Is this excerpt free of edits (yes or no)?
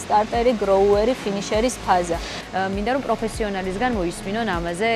no